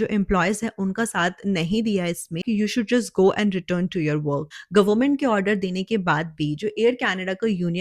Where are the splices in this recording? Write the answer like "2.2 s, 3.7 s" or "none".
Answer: 2.4 s, 4.5 s